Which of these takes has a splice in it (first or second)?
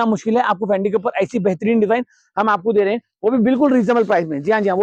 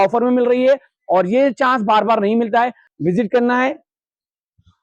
second